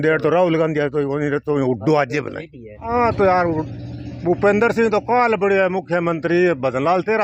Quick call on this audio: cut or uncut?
cut